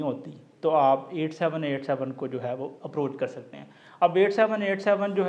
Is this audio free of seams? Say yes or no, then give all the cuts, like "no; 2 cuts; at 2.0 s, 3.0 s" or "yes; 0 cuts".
yes; 0 cuts